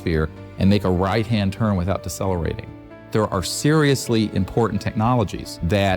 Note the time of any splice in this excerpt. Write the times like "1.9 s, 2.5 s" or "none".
3.0 s